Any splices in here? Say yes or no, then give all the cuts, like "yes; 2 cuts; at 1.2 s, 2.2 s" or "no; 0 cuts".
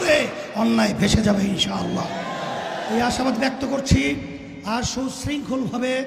no; 0 cuts